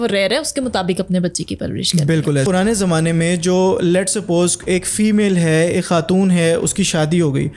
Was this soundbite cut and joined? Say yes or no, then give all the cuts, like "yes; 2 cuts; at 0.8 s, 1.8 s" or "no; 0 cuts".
yes; 1 cut; at 2.4 s